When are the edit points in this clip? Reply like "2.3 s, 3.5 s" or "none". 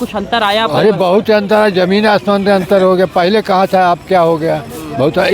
none